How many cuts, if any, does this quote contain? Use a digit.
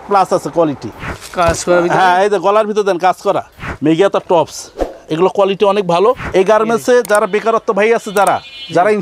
2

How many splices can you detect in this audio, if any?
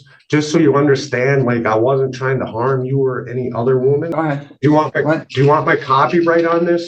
1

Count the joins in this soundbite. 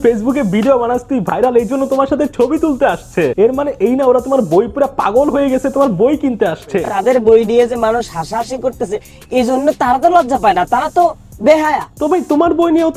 2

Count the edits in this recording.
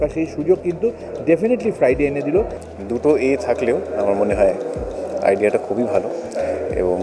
1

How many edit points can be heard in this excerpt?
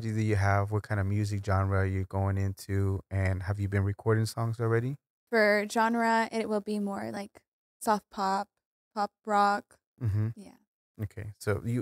1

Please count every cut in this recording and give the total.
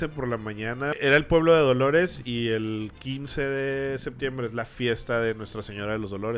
1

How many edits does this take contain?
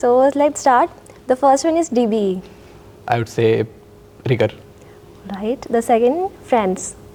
0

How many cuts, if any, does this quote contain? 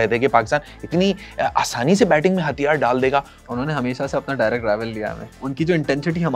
2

